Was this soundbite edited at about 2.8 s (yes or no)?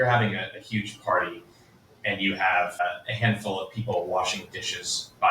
yes